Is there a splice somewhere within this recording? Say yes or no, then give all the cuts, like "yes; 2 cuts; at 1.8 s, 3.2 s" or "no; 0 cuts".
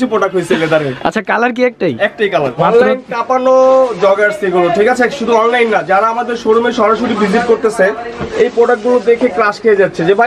yes; 1 cut; at 2.6 s